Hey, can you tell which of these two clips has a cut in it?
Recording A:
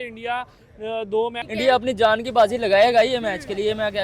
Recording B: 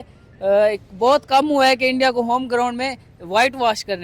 A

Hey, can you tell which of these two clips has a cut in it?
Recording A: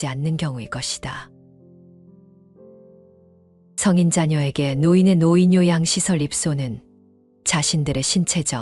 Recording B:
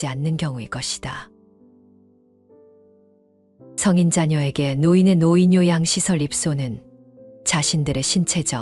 A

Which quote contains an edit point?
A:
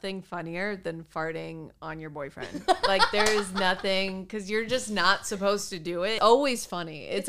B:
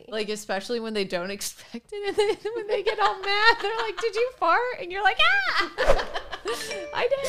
A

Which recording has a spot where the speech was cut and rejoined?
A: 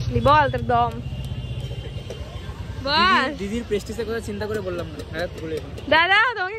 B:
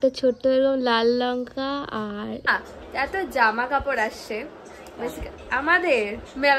B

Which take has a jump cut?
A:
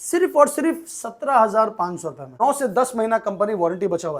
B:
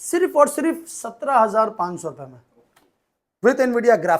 A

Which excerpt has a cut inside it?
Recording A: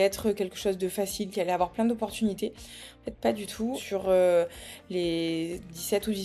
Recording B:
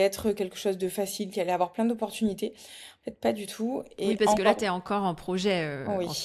A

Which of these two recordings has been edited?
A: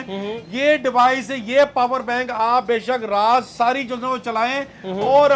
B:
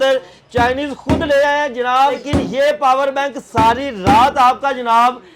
B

